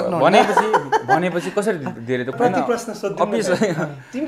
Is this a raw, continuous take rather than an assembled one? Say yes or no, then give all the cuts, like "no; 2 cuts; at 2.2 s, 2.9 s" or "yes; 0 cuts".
no; 1 cut; at 2.4 s